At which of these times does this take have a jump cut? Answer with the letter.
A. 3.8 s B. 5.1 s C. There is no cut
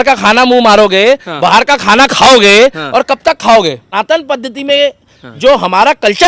A